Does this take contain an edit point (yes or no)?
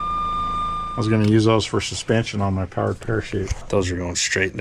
yes